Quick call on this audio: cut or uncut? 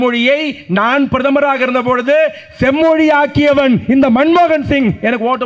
uncut